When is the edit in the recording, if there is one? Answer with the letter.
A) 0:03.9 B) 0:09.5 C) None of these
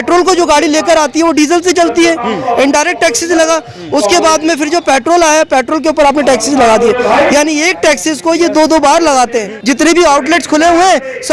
B